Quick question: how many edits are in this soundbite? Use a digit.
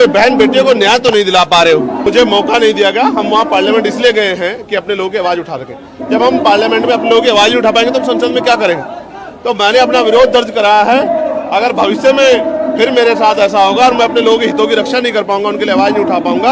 1